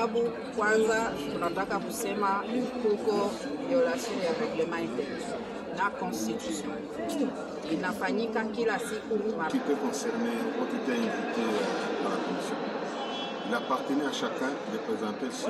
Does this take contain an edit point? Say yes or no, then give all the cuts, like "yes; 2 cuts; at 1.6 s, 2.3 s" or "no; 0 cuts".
yes; 1 cut; at 9.5 s